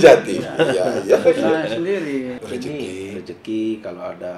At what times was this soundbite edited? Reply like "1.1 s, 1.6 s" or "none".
2.3 s